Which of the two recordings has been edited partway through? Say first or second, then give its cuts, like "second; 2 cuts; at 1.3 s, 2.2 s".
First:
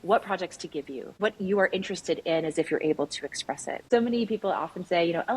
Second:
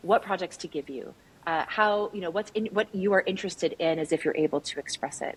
first; 2 cuts; at 1.1 s, 3.8 s